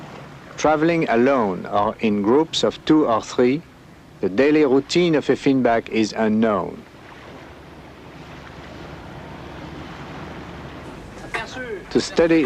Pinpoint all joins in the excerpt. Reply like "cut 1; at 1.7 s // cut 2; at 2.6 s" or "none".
cut 1; at 1.0 s